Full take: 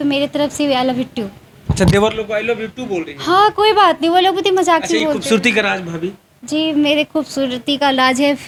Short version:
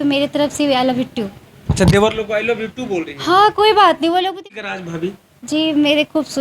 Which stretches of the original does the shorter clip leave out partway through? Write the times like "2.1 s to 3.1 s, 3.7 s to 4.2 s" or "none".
4.4 s to 5.5 s